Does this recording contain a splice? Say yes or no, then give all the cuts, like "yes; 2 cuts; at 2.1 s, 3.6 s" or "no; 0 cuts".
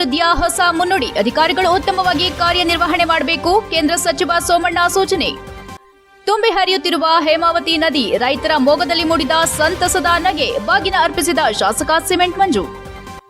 no; 0 cuts